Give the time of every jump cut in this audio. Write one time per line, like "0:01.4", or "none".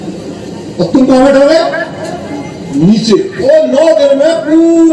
0:03.3